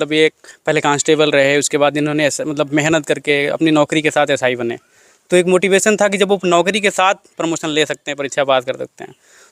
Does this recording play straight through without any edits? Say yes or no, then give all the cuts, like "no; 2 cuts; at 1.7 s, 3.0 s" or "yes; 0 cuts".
yes; 0 cuts